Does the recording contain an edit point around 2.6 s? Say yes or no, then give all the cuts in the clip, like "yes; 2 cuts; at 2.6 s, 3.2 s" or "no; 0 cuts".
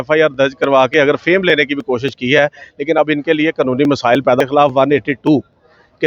no; 1 cut; at 4.4 s